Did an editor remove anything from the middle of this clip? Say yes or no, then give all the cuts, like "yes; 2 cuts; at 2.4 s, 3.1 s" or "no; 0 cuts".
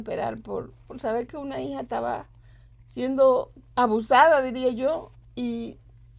no; 0 cuts